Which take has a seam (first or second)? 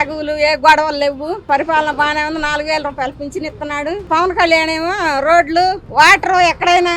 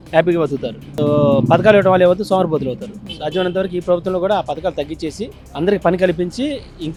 first